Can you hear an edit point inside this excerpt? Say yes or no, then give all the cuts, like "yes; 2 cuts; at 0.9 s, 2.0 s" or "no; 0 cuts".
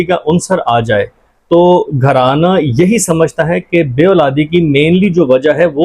no; 0 cuts